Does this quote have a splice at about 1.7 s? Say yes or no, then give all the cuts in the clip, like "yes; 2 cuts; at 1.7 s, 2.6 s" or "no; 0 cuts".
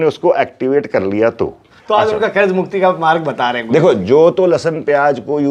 yes; 1 cut; at 1.7 s